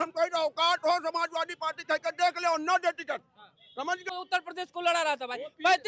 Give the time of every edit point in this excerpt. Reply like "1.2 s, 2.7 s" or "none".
4.1 s